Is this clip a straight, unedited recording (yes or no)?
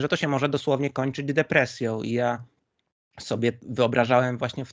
no